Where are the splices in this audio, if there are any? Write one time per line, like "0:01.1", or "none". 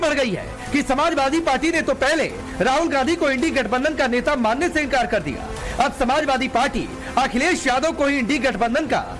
none